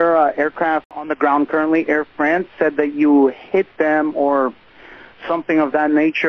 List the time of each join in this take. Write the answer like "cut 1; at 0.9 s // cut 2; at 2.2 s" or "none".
cut 1; at 1.0 s